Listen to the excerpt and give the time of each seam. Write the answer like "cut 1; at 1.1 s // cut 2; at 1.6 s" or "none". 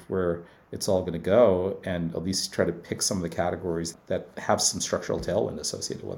cut 1; at 3.9 s